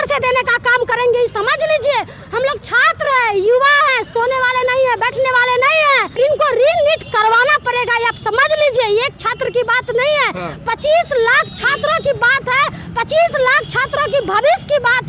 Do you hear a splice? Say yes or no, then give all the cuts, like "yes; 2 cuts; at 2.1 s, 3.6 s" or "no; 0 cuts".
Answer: yes; 1 cut; at 6.1 s